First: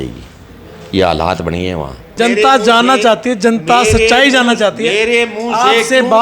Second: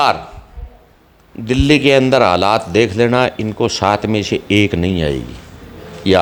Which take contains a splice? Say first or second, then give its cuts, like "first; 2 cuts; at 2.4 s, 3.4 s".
first; 1 cut; at 2.0 s